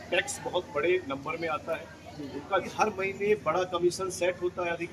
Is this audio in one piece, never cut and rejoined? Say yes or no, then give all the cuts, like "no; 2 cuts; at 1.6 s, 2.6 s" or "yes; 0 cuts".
no; 1 cut; at 2.7 s